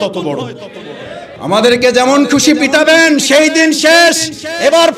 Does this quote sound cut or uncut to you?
cut